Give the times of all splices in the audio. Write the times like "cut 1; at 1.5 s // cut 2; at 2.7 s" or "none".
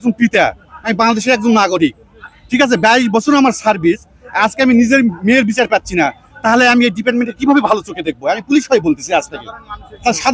none